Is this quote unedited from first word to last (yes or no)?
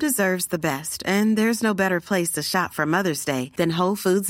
yes